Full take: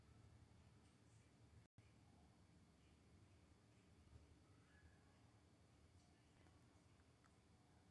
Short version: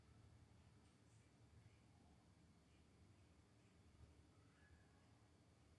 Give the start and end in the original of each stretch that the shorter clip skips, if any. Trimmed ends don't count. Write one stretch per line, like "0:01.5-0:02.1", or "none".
0:01.7-0:01.8